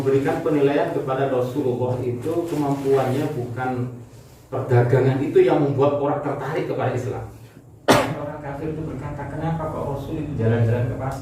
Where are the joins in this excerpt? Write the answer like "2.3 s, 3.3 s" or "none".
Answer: 8.4 s